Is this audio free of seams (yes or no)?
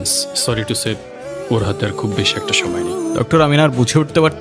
no